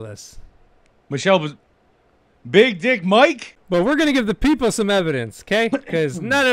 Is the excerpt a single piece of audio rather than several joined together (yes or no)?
no